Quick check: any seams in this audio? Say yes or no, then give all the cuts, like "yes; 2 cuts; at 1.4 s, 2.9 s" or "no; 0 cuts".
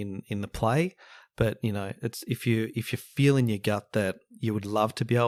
no; 0 cuts